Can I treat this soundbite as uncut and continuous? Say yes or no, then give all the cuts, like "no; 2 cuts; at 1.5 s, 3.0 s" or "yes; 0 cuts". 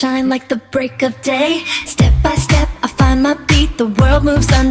yes; 0 cuts